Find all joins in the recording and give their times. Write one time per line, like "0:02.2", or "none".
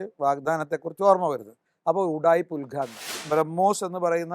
0:03.2